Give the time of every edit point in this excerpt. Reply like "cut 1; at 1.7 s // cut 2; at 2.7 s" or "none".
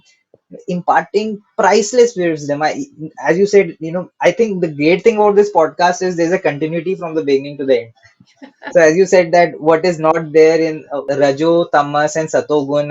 cut 1; at 11.0 s